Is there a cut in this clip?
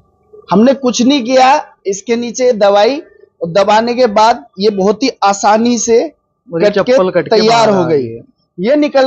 no; 0 cuts

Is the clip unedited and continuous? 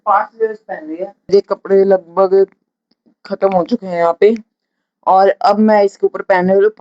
no; 1 cut; at 1.3 s

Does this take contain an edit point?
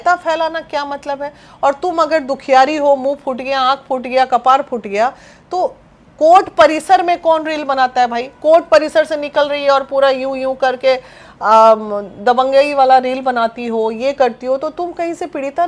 no; 0 cuts

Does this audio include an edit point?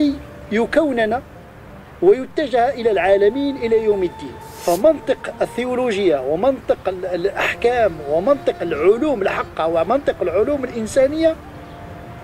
yes; 1 cut; at 4.5 s

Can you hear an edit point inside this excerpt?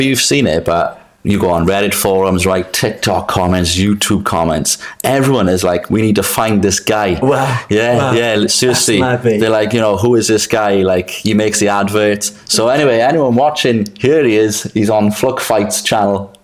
no; 0 cuts

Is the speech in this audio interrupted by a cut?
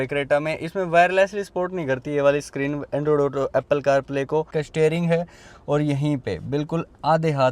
yes; 1 cut; at 4.6 s

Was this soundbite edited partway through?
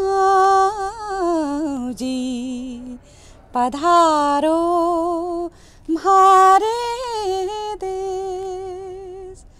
no; 0 cuts

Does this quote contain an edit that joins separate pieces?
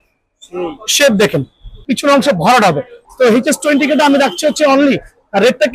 yes; 2 cuts; at 1.8 s, 3.0 s

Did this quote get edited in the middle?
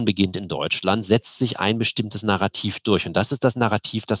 no; 0 cuts

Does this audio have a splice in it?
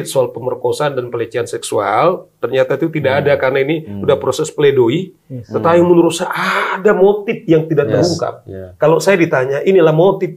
no; 0 cuts

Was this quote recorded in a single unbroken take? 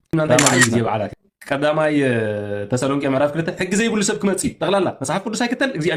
no; 1 cut; at 1.1 s

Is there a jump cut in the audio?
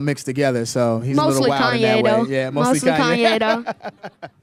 no; 0 cuts

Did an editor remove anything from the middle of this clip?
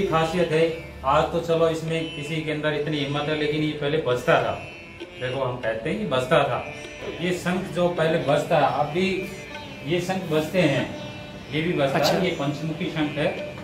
yes; 1 cut; at 6.9 s

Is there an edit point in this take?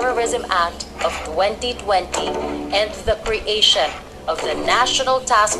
no; 0 cuts

